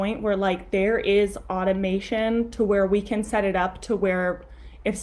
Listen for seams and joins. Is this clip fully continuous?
yes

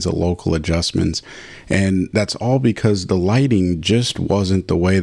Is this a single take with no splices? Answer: yes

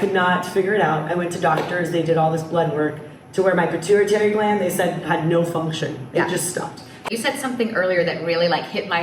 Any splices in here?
yes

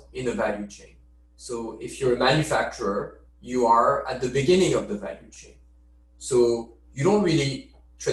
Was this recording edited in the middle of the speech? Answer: no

